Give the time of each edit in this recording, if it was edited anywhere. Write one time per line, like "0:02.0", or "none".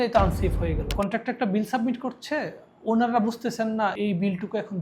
0:00.9

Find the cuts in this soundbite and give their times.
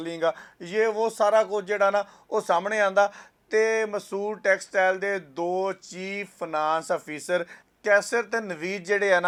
none

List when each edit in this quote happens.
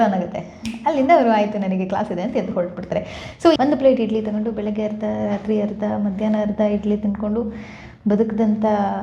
0:03.6

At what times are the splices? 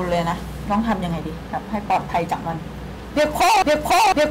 none

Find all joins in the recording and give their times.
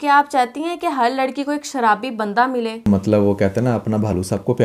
0:02.9

